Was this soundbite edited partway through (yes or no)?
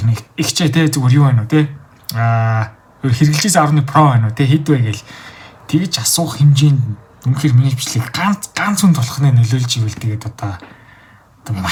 no